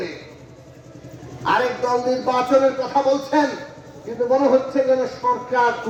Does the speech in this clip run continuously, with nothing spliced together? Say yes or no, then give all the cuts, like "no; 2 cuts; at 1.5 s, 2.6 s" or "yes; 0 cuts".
yes; 0 cuts